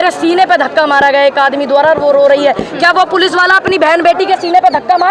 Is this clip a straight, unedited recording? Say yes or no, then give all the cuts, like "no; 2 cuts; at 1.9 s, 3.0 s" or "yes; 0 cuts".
yes; 0 cuts